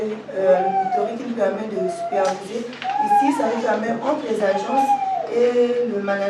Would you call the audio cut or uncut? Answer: uncut